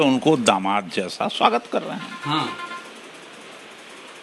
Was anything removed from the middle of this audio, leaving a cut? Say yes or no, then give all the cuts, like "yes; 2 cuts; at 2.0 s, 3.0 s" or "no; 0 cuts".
no; 0 cuts